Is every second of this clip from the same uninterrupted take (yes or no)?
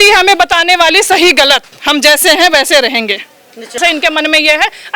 no